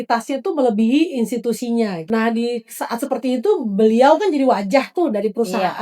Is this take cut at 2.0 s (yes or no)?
yes